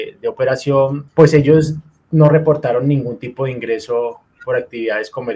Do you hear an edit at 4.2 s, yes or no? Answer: no